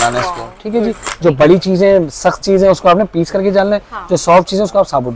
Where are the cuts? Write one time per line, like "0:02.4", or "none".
none

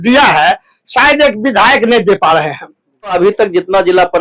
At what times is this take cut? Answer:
0:03.1

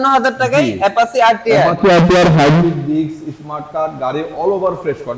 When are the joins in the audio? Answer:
none

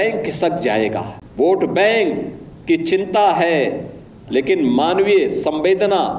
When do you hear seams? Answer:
0:01.2

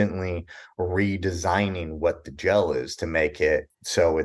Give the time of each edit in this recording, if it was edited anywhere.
none

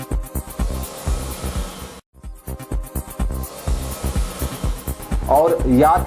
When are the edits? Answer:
0:04.8

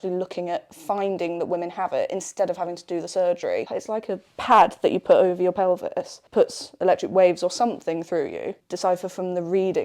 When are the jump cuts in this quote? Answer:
0:03.7
0:06.2
0:08.6

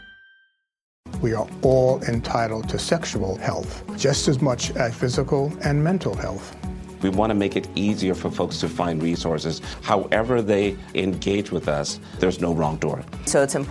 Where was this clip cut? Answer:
0:01.0

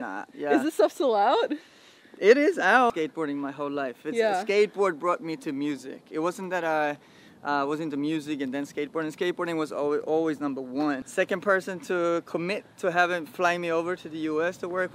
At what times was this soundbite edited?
0:02.9
0:11.0

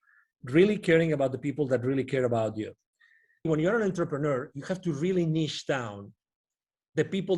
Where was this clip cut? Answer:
0:03.5

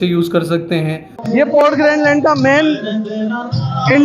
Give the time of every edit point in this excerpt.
0:01.1

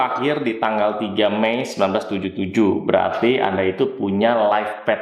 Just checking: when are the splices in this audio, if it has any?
none

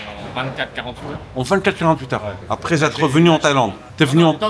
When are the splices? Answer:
none

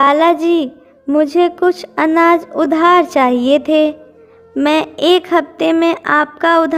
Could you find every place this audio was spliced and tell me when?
none

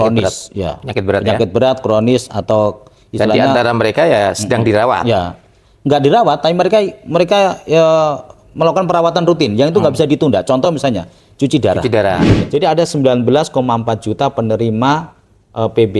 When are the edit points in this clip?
0:12.3

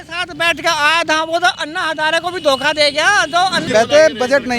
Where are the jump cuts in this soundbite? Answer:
0:03.6

